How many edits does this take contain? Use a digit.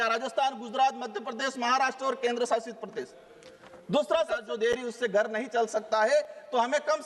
1